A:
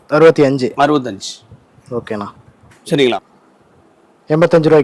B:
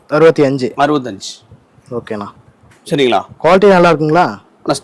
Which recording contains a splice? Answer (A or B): A